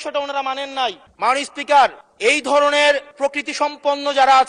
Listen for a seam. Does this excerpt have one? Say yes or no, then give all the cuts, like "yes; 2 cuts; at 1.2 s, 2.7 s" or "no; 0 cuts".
yes; 3 cuts; at 1.0 s, 2.1 s, 3.1 s